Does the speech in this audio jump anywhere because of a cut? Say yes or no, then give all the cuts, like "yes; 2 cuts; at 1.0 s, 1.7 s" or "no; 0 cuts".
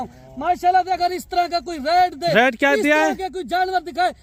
no; 0 cuts